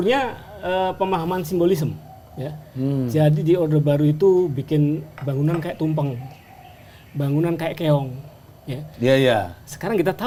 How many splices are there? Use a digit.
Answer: 0